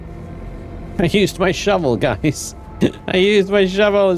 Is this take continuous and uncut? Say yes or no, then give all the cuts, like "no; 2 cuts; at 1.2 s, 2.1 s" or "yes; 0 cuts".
yes; 0 cuts